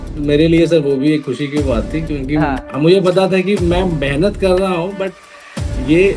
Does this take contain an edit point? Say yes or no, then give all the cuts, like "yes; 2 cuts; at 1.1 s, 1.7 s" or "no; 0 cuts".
no; 0 cuts